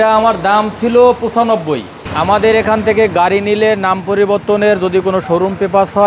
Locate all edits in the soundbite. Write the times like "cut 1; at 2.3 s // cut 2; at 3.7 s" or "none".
cut 1; at 2.0 s